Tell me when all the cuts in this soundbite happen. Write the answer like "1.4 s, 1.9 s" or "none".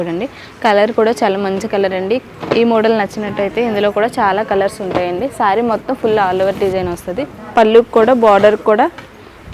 none